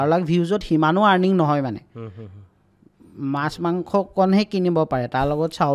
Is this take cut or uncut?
uncut